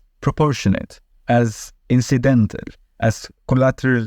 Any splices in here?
no; 0 cuts

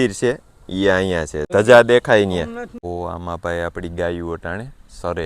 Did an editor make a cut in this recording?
yes; 2 cuts; at 1.5 s, 2.8 s

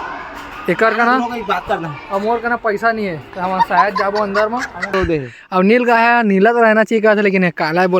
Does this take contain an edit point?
yes; 1 cut; at 4.9 s

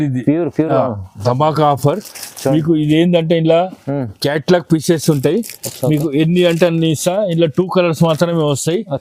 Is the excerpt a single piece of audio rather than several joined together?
yes; 0 cuts

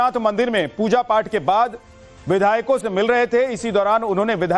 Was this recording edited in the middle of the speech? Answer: no; 0 cuts

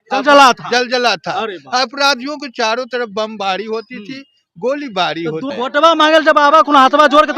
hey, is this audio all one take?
no; 1 cut; at 5.5 s

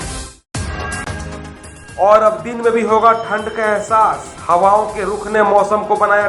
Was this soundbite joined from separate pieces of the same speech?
no; 0 cuts

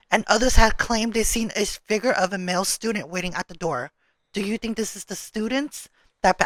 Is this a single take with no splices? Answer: yes; 0 cuts

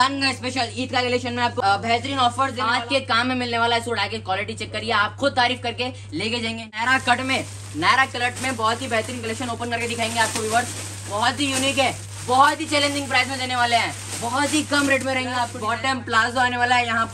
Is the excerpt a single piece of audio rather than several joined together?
no; 4 cuts; at 1.5 s, 2.7 s, 6.7 s, 15.6 s

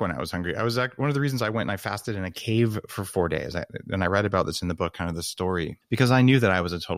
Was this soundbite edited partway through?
yes; 1 cut; at 5.8 s

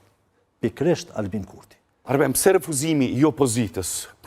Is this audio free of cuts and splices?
no; 1 cut; at 2.0 s

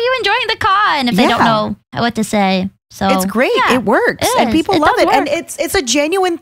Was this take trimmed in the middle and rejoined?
yes; 1 cut; at 1.8 s

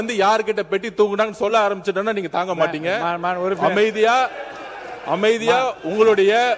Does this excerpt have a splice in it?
no; 0 cuts

